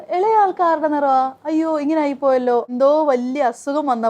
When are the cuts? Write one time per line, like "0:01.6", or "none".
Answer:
0:02.7